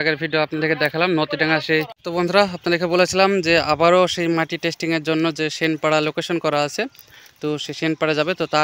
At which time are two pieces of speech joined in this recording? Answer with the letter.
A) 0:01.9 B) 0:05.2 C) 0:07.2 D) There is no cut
A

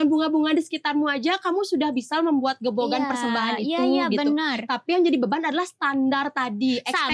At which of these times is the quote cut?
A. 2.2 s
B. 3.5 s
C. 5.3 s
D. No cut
D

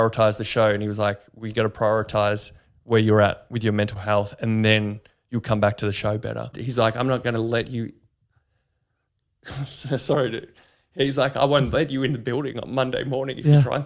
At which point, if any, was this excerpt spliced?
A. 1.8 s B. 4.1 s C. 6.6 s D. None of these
C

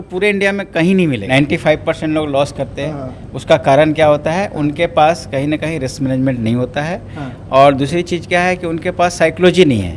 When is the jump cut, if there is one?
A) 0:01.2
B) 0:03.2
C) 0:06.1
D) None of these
A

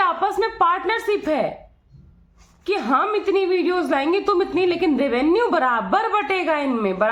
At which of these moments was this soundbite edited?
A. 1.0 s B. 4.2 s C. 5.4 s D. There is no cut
D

